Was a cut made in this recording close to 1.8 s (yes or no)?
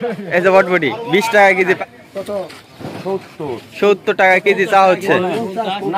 yes